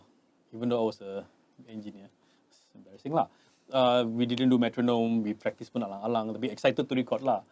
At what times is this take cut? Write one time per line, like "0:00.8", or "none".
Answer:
none